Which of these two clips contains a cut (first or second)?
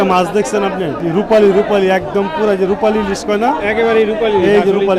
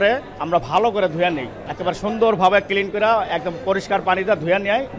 first